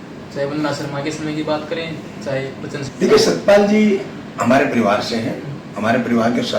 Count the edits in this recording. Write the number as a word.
one